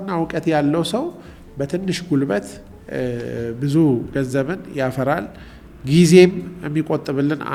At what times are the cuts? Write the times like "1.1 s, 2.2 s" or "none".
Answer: none